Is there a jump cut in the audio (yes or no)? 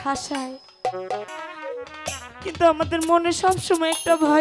yes